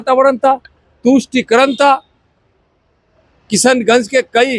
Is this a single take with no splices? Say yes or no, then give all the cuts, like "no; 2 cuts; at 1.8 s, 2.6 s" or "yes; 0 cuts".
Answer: yes; 0 cuts